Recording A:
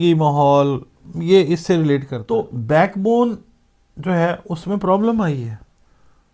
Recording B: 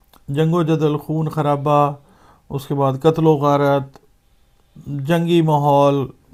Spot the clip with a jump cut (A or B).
A